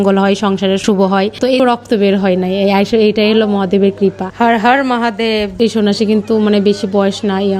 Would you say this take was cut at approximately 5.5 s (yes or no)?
yes